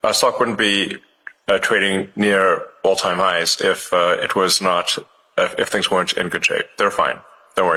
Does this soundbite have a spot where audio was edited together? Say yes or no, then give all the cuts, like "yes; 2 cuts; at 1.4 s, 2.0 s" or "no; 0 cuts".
no; 0 cuts